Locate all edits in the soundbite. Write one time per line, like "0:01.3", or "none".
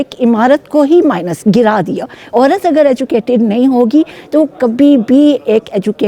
0:02.2